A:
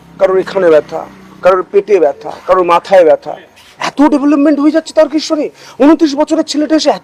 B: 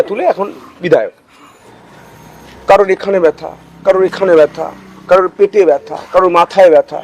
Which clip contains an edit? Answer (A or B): B